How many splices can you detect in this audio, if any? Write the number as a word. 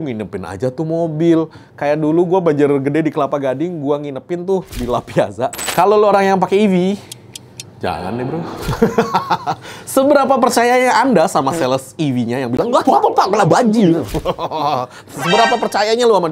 one